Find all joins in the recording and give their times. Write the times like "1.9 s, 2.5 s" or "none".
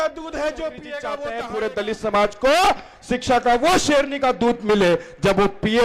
1.3 s

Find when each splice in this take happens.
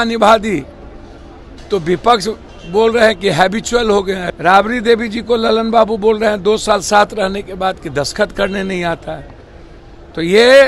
4.2 s

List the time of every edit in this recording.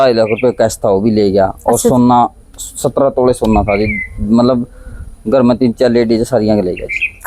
none

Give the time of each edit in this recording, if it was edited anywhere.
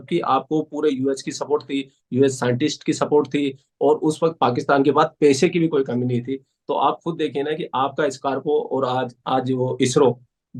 none

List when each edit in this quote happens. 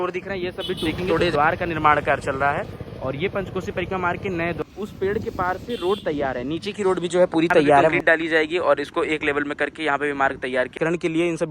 1.3 s, 4.6 s, 8.0 s, 10.8 s

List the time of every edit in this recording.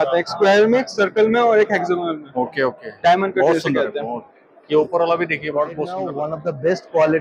6.1 s

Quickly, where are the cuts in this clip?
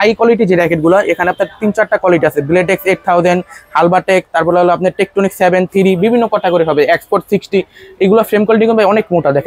none

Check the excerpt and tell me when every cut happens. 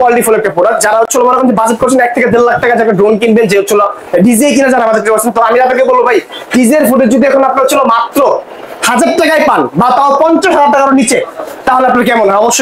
none

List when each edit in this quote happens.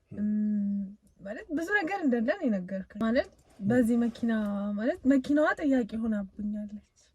3.0 s

